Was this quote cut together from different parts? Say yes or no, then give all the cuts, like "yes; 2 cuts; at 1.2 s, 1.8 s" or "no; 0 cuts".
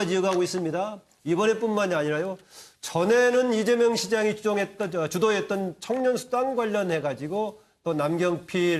no; 0 cuts